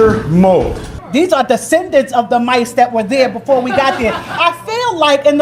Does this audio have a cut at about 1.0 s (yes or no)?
yes